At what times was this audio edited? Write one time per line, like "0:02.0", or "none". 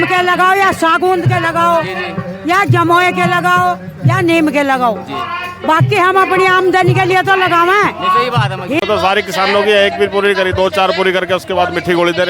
0:08.8